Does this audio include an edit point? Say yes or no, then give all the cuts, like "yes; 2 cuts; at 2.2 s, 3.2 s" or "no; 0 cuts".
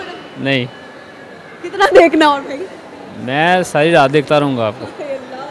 no; 0 cuts